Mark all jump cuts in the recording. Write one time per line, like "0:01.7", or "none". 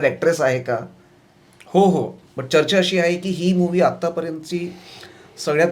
0:02.2